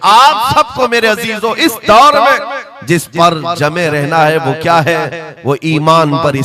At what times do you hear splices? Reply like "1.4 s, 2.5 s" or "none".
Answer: none